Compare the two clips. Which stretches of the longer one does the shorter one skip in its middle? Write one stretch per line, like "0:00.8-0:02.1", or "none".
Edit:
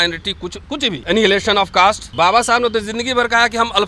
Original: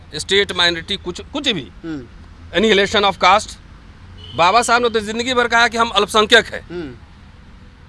0:01.6-0:02.5
0:03.5-0:04.3